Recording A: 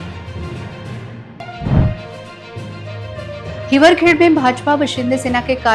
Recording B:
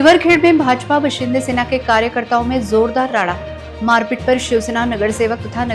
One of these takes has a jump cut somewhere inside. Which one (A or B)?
A